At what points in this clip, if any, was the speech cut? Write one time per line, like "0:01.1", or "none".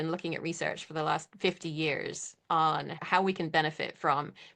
0:03.0